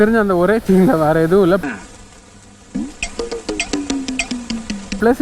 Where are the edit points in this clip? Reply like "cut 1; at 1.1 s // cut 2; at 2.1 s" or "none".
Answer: none